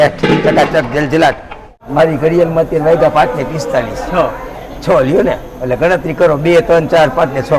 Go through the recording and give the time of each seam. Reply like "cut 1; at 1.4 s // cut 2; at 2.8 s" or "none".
cut 1; at 1.8 s